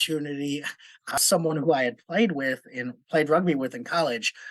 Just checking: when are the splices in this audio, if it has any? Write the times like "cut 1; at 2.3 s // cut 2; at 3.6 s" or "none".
cut 1; at 1.1 s